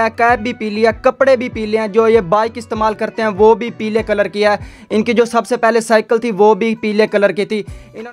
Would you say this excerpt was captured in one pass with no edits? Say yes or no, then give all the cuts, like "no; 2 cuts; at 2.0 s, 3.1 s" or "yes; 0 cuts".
yes; 0 cuts